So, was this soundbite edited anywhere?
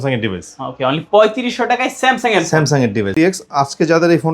yes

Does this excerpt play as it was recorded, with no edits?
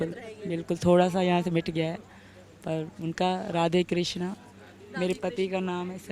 yes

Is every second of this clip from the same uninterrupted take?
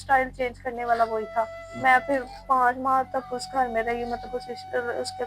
no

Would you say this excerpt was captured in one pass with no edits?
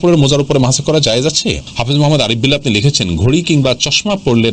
no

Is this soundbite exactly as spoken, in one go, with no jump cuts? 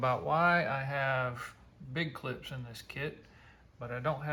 yes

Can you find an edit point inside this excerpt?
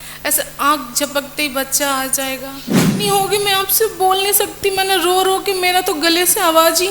yes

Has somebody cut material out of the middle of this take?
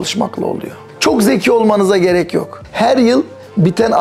yes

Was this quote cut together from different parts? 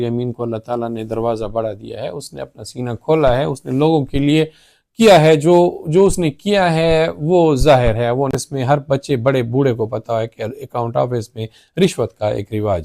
yes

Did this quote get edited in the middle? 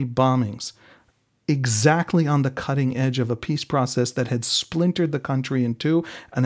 no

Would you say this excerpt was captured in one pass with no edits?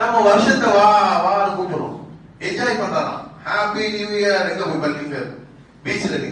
yes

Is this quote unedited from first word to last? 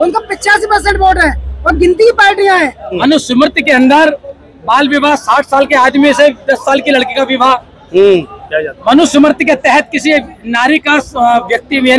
no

